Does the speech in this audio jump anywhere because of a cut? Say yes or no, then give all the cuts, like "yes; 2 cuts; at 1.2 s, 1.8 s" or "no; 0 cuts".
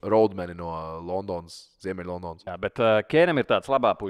yes; 1 cut; at 2.4 s